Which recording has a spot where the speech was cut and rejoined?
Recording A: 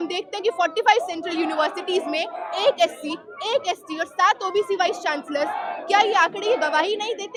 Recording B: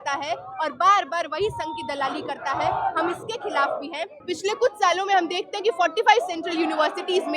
B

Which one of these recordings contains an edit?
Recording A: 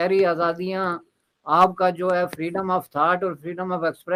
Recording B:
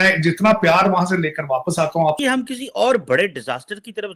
B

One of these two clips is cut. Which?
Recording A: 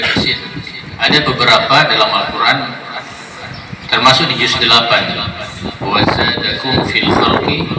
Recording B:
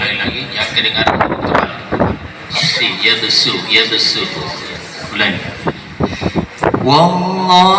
B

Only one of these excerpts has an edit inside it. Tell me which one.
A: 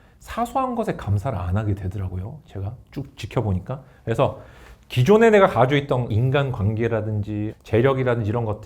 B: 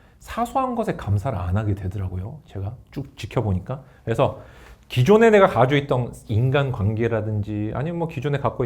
A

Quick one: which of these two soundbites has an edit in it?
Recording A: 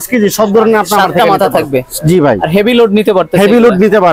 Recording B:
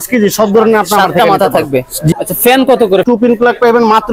B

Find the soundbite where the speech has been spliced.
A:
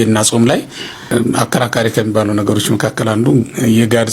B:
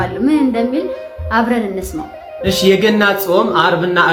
A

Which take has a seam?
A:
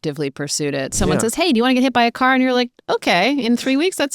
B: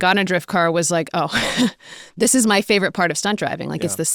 A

